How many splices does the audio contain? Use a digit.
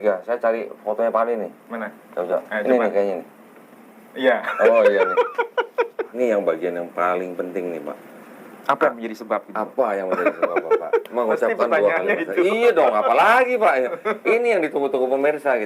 1